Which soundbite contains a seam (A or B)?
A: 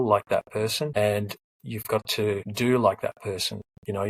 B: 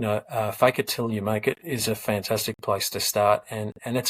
A